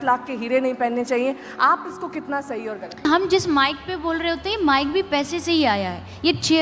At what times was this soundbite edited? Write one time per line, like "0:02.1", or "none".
0:03.0